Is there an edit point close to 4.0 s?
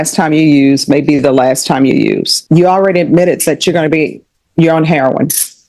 no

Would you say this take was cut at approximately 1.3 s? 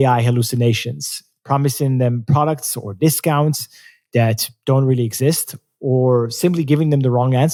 no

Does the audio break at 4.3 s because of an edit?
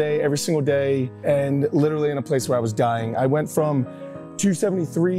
no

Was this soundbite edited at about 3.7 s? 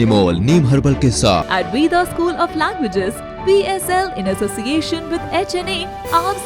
no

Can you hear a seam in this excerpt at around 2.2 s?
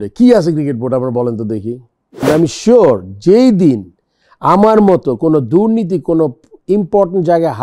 yes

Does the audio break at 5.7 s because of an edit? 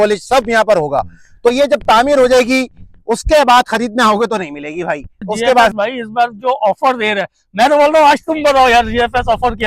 yes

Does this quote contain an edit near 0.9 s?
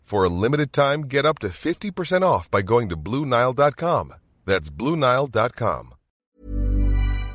no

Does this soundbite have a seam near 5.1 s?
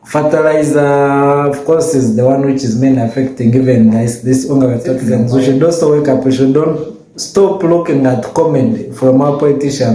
yes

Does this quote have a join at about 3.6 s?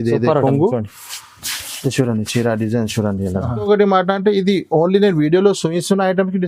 yes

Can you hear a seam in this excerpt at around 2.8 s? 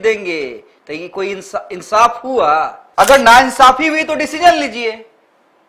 yes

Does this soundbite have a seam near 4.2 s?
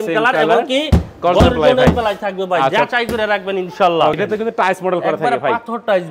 yes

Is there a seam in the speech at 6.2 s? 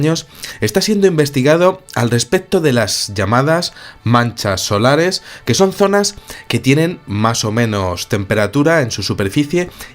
no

